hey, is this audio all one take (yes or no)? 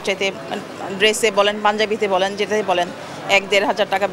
yes